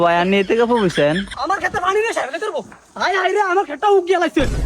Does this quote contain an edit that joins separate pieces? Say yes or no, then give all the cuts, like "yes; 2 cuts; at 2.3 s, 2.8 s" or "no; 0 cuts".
yes; 1 cut; at 1.3 s